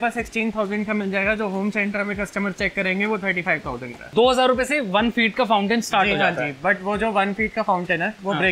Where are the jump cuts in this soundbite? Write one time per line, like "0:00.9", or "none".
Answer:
0:03.9